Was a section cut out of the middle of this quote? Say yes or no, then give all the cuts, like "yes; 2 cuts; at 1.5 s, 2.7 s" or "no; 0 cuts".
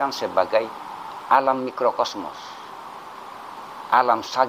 no; 0 cuts